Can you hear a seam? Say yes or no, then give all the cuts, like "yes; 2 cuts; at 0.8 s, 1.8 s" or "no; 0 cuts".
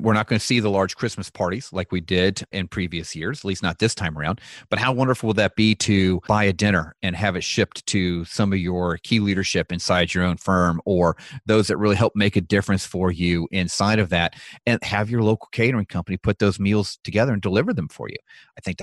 yes; 2 cuts; at 2.5 s, 6.2 s